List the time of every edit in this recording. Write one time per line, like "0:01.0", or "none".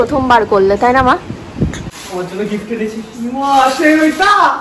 0:01.9